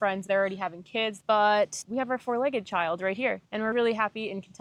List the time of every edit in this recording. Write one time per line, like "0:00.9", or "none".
none